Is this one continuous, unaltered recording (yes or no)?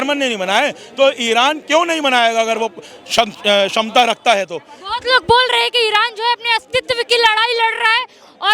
yes